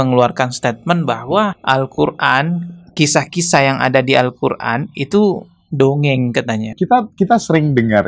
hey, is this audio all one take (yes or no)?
yes